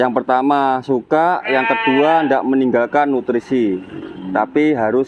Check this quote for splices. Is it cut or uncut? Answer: uncut